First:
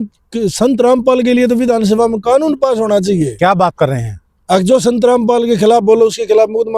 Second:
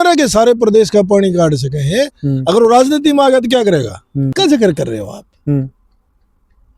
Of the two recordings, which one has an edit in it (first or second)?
second